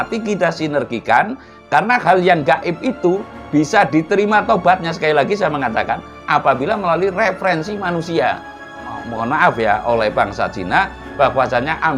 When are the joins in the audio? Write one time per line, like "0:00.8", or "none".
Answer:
0:08.8